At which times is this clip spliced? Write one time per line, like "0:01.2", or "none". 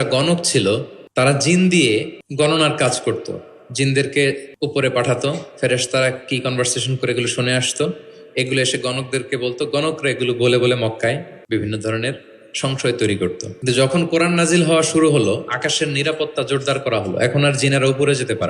0:01.0
0:02.2
0:04.5
0:11.3
0:13.5